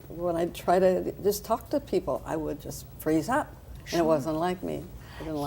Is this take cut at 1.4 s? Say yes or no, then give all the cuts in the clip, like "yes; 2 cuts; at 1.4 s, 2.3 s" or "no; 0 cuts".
yes; 1 cut; at 1.4 s